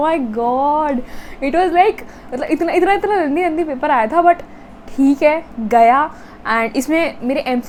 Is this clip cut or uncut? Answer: uncut